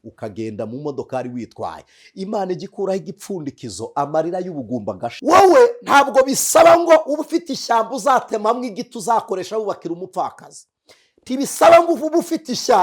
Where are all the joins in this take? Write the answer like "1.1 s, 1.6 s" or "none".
5.1 s